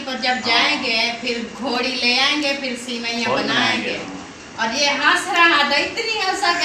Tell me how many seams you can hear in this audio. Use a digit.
0